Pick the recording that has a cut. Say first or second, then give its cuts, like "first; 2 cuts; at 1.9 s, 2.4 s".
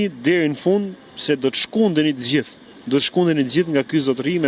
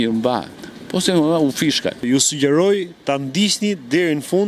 second; 1 cut; at 2.0 s